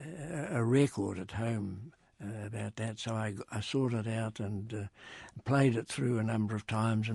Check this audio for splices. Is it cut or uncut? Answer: uncut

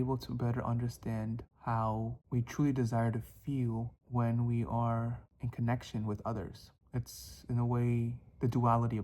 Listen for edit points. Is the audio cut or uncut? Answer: cut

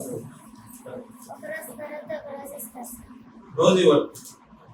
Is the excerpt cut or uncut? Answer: uncut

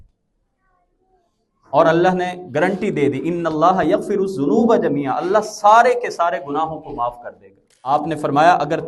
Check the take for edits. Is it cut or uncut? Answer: cut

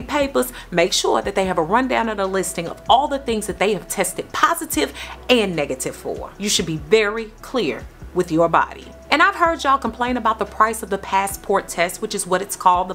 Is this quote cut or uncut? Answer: uncut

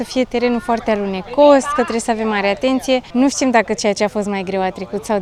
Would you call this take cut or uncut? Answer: uncut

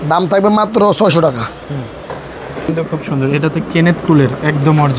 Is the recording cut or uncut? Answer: cut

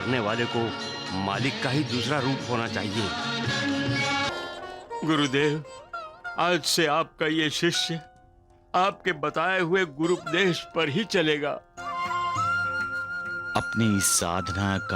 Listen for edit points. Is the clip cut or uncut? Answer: cut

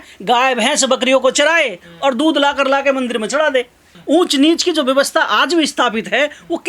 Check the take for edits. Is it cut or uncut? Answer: cut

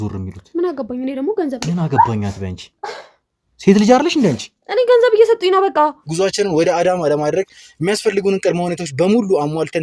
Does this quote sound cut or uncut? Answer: cut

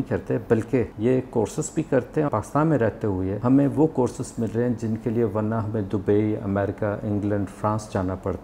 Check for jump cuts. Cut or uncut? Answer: cut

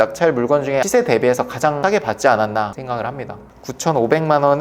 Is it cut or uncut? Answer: cut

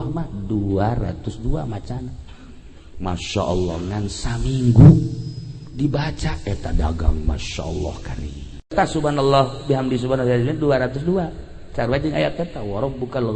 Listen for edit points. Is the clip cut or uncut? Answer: cut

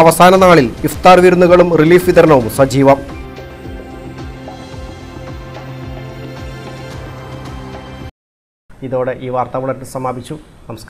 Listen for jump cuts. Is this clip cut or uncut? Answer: uncut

